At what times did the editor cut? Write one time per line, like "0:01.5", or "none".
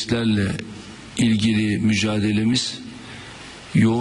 0:01.7